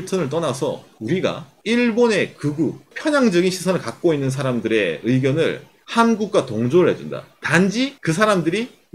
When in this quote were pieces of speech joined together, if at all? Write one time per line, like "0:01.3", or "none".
0:02.9
0:08.0